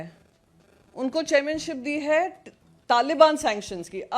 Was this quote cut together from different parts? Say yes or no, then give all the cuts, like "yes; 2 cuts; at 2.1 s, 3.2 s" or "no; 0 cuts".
no; 0 cuts